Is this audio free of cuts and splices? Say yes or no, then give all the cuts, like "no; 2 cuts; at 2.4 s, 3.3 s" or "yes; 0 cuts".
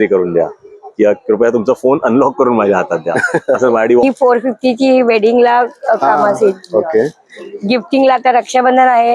no; 1 cut; at 4.0 s